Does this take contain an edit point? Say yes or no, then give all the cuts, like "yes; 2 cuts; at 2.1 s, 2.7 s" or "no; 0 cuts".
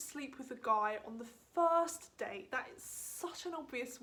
no; 0 cuts